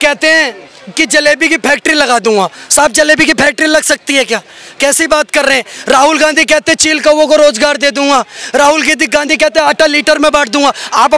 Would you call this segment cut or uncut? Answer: uncut